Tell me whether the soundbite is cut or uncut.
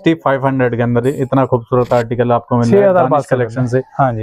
uncut